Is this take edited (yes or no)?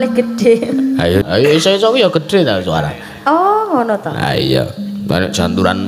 yes